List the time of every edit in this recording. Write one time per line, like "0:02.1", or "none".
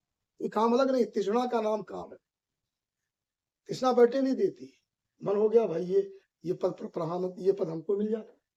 none